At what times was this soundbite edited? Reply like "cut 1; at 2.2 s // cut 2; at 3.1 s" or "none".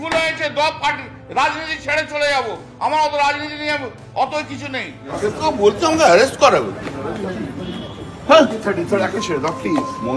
cut 1; at 5.1 s

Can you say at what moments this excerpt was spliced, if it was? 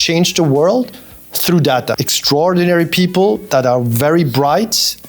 cut 1; at 2.1 s

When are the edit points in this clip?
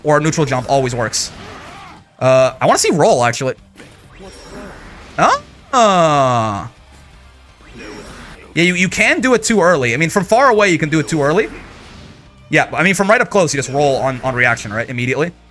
none

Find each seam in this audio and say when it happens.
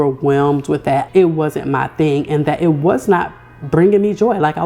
cut 1; at 1.1 s

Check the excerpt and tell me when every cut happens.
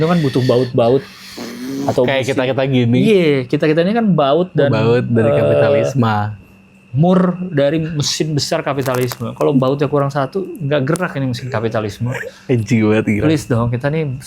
none

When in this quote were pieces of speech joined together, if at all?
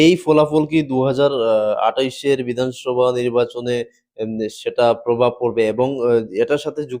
none

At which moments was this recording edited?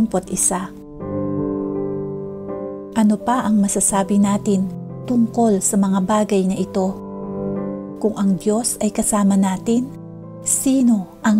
none

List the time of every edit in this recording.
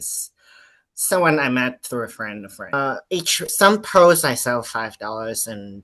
cut 1; at 2.7 s

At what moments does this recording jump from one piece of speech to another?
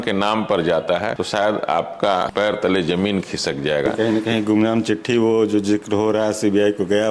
cut 1; at 1.2 s // cut 2; at 2.3 s // cut 3; at 3.9 s

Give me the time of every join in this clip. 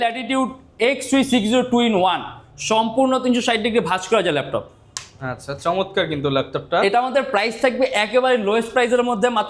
none

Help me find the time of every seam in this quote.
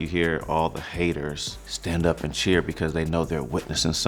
none

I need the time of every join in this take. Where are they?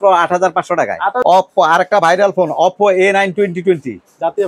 cut 1; at 1.2 s

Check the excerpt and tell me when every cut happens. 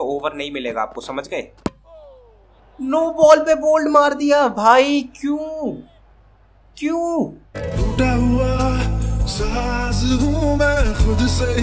none

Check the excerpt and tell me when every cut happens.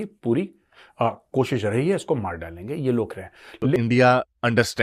cut 1; at 3.8 s

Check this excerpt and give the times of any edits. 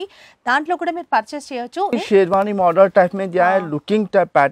cut 1; at 1.9 s

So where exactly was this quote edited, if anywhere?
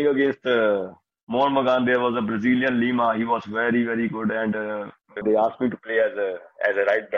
cut 1; at 5.2 s

